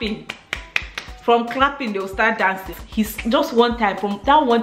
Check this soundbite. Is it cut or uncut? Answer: cut